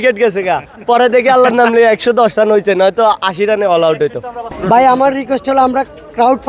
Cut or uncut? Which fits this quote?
cut